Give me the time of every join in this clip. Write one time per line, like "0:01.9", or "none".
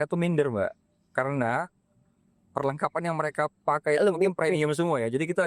none

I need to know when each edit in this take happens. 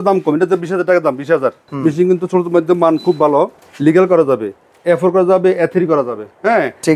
0:01.7
0:03.6

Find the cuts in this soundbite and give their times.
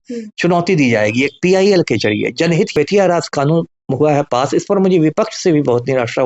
0:02.7

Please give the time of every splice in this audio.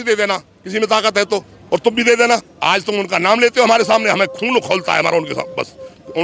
0:01.5
0:02.5

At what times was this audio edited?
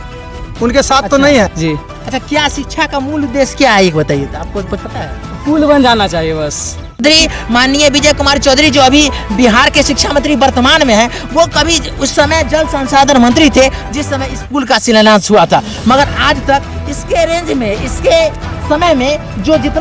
0:01.5
0:07.0

